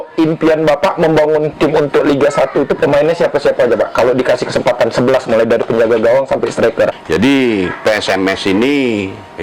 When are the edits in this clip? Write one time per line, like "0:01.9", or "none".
0:07.0